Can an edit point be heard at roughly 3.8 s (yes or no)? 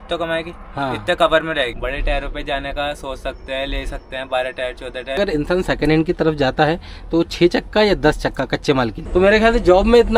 no